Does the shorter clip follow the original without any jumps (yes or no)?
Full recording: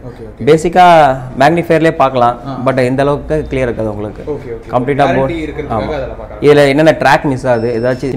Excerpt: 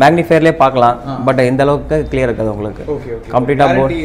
yes